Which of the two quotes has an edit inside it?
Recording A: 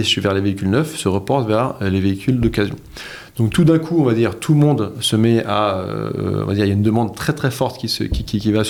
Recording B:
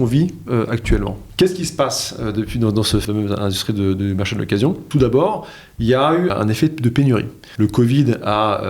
B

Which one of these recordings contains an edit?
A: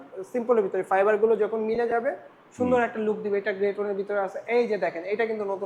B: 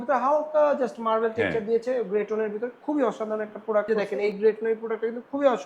B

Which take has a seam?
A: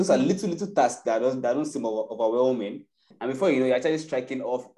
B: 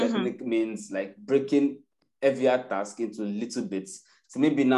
A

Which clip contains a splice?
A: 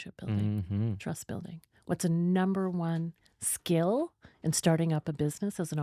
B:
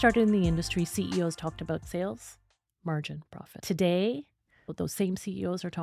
B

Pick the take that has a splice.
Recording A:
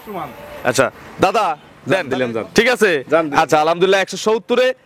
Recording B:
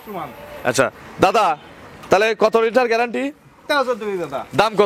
A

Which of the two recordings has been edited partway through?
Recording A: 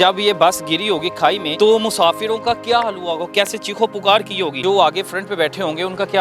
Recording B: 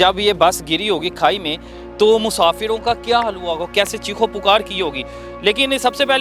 A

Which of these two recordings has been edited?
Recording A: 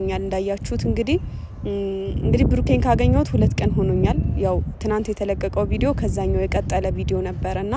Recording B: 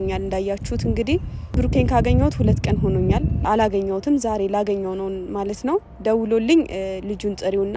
B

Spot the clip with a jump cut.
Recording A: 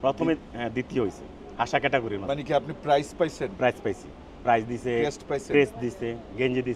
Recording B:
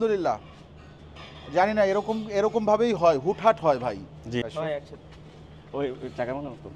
B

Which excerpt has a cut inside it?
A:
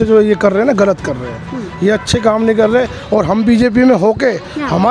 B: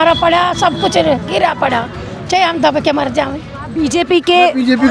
B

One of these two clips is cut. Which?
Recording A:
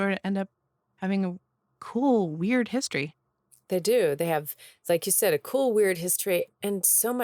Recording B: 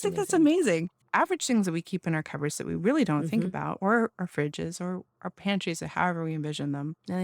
B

